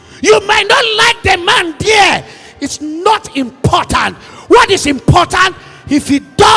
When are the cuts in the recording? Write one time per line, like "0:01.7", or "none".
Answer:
none

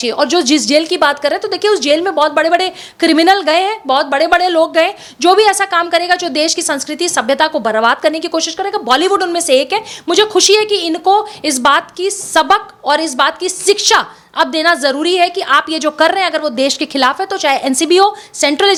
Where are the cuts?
none

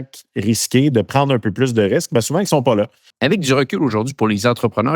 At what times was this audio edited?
0:03.1

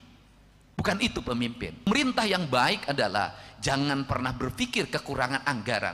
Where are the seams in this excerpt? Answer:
0:01.9

